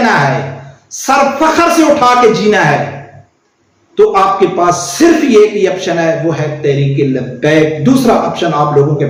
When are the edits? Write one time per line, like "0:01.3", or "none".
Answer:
none